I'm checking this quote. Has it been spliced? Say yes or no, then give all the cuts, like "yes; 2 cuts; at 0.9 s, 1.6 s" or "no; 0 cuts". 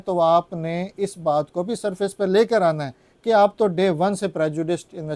no; 0 cuts